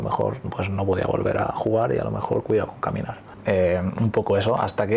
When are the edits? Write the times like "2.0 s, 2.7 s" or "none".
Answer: 3.3 s